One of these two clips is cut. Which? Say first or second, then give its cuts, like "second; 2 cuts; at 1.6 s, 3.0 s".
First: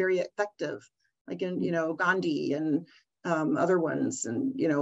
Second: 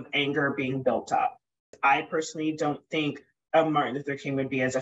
second; 1 cut; at 1.8 s